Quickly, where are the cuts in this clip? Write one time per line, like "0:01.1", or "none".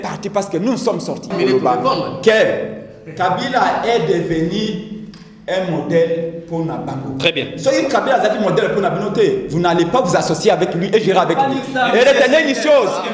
0:01.3